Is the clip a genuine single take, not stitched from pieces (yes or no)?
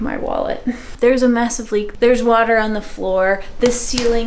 no